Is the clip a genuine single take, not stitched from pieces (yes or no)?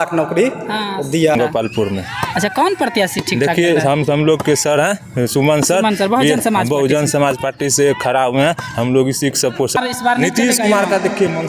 no